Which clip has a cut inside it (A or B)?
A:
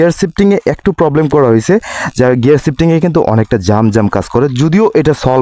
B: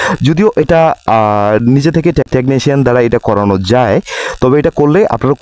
B